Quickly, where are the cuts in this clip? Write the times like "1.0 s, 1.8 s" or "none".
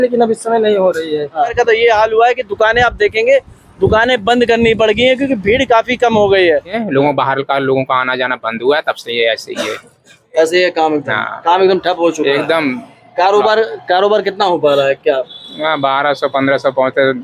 1.5 s, 6.8 s